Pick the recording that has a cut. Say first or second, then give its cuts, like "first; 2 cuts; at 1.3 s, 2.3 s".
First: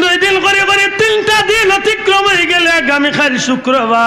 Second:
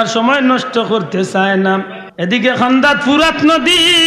second; 1 cut; at 2.0 s